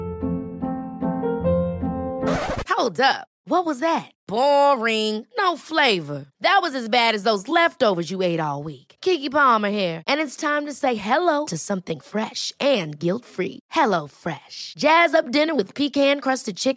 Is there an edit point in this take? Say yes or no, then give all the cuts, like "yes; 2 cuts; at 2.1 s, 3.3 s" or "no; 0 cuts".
no; 0 cuts